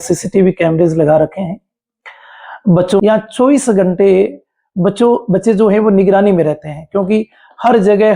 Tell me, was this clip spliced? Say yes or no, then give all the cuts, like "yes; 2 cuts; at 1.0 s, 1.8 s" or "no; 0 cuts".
yes; 1 cut; at 3.0 s